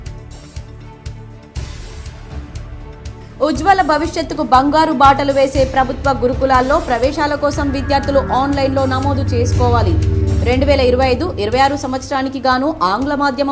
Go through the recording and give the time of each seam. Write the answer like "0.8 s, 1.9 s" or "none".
none